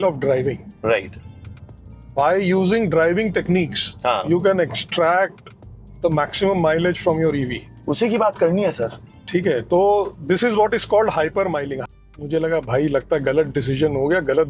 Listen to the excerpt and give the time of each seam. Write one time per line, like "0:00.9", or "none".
0:11.7